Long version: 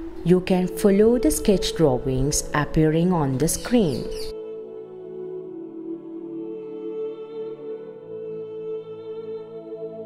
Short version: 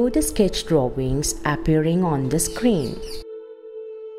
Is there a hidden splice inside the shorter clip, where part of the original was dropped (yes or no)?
yes